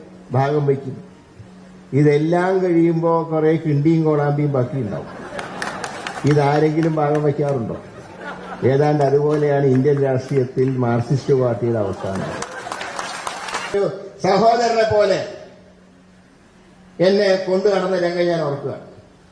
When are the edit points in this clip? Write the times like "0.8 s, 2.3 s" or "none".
13.7 s